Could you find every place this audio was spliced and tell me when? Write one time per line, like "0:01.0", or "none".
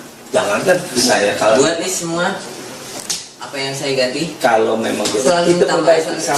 0:01.0
0:05.2